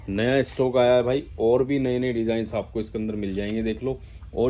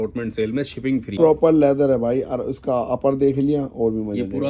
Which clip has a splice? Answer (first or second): second